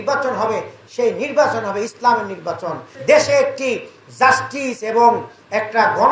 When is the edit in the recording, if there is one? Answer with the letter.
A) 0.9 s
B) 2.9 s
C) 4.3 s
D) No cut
B